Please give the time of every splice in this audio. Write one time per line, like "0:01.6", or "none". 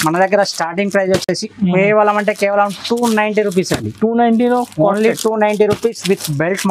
none